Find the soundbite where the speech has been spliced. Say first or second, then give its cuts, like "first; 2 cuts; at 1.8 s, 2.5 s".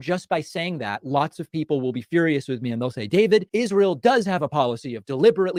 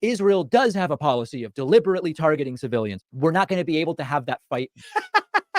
second; 1 cut; at 3.0 s